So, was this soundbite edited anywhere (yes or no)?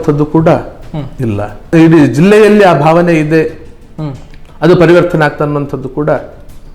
yes